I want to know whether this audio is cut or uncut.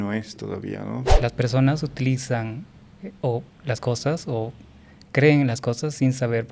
cut